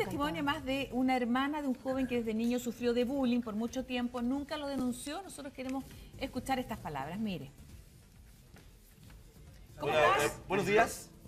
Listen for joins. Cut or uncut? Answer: cut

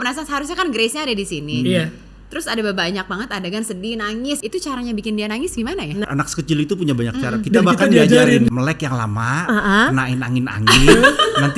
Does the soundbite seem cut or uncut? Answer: cut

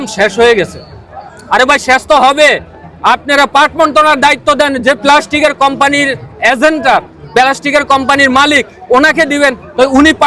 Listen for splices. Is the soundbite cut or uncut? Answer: uncut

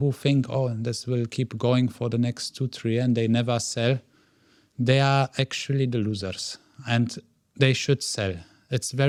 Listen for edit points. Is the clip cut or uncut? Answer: uncut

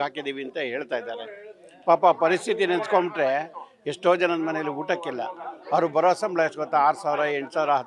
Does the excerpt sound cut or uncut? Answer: uncut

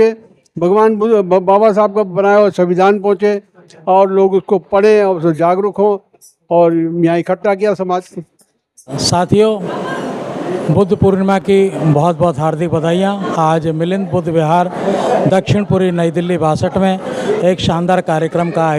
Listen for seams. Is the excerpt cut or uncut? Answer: uncut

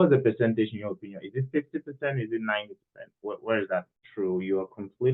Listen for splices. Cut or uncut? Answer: cut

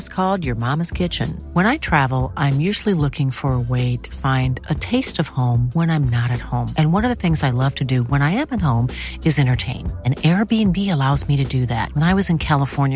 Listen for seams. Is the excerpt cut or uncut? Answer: uncut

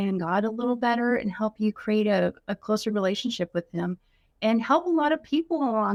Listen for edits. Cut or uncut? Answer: uncut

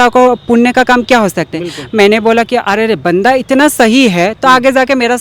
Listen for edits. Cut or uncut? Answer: uncut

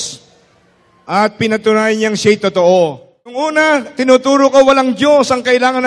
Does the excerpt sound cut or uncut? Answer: cut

